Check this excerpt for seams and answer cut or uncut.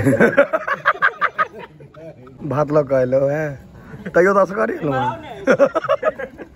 cut